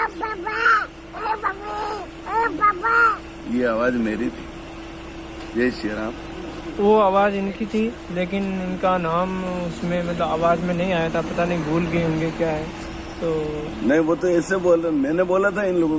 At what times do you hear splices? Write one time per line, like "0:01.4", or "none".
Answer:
none